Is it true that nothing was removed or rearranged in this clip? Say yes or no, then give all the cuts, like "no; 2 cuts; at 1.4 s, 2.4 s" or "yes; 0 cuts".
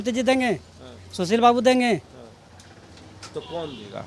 yes; 0 cuts